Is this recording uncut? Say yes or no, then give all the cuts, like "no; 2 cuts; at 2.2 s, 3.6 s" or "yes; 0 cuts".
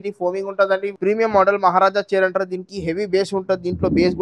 no; 1 cut; at 0.9 s